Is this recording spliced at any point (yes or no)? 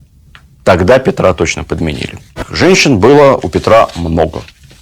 yes